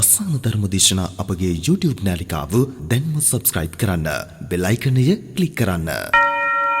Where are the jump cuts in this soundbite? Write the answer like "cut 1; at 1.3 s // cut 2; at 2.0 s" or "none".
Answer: cut 1; at 5.8 s